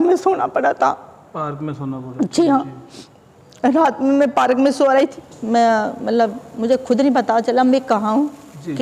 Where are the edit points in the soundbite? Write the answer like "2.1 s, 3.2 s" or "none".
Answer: 4.9 s